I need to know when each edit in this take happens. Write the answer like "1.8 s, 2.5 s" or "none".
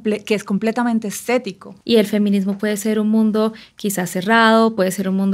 1.7 s